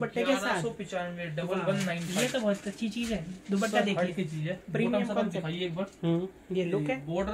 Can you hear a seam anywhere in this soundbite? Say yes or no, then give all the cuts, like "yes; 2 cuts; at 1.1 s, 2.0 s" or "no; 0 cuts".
no; 0 cuts